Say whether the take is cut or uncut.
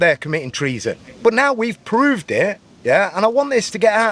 cut